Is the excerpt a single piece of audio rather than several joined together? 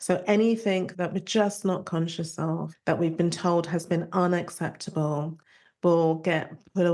no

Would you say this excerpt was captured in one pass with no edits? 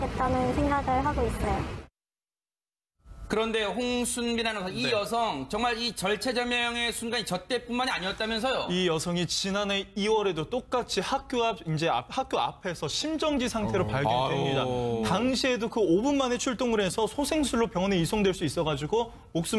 no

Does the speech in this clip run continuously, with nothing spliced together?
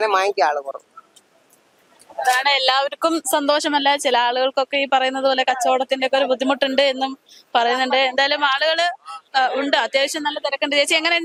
yes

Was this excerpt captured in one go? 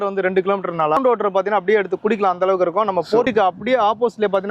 no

